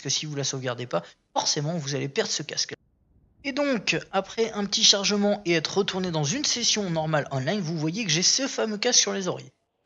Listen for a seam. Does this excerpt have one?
yes; 1 cut; at 5.9 s

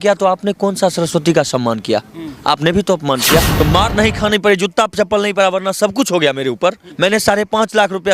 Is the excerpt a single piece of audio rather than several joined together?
no; 2 cuts; at 3.5 s, 6.9 s

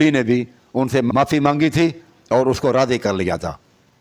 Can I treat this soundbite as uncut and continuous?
no; 1 cut; at 1.1 s

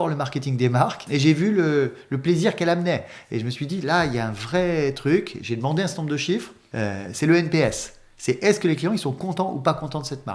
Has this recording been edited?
yes; 2 cuts; at 1.0 s, 6.6 s

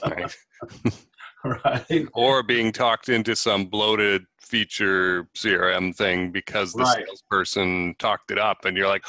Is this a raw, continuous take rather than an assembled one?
yes; 0 cuts

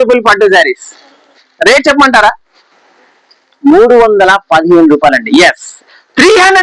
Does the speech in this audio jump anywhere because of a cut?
no; 0 cuts

